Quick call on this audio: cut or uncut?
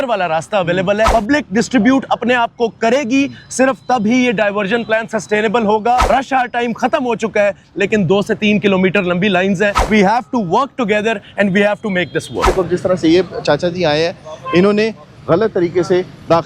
cut